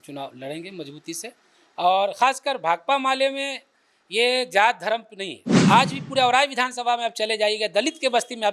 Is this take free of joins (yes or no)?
no